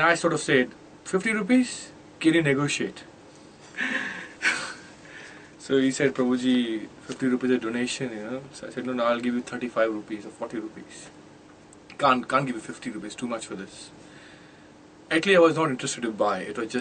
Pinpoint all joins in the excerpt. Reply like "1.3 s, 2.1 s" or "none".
none